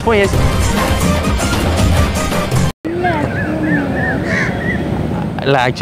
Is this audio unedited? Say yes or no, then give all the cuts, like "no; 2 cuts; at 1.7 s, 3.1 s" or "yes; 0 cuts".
no; 1 cut; at 2.8 s